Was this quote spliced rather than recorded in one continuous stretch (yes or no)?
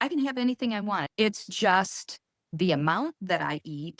yes